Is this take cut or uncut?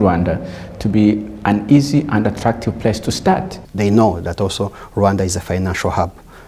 cut